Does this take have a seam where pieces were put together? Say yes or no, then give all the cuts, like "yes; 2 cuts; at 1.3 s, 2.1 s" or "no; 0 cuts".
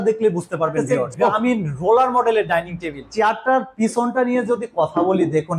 yes; 2 cuts; at 1.0 s, 3.0 s